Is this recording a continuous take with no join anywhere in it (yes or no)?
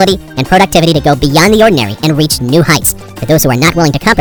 yes